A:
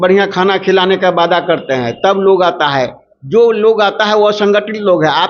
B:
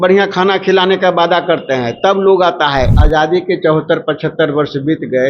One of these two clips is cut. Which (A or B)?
B